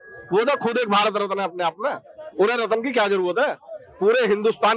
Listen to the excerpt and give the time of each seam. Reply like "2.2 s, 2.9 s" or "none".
none